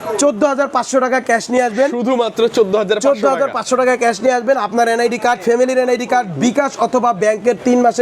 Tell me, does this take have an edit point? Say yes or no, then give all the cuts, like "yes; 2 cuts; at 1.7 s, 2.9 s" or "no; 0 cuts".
no; 0 cuts